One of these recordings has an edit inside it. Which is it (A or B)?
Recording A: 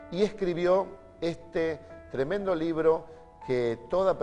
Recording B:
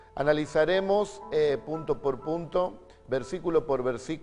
A